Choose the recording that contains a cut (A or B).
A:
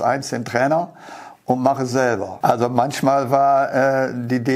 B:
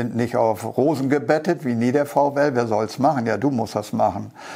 A